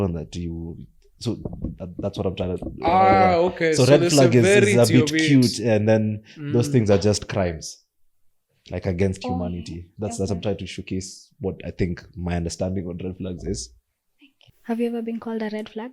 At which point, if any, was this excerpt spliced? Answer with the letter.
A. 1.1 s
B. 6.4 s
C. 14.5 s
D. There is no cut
C